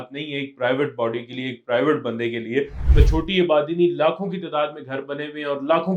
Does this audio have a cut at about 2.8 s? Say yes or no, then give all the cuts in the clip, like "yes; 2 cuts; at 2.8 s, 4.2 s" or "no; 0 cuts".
yes; 1 cut; at 2.8 s